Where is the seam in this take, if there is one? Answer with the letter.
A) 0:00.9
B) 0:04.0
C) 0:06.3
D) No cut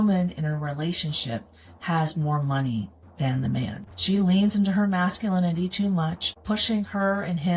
C